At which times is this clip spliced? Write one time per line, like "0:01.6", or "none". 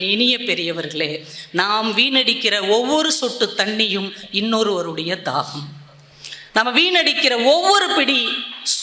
none